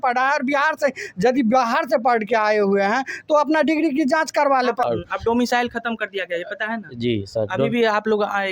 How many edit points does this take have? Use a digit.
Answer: 0